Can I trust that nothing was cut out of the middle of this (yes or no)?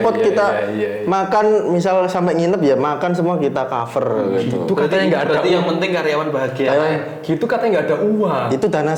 yes